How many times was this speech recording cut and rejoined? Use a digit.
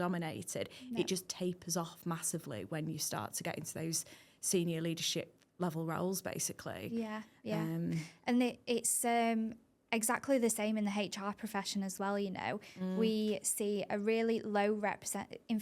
0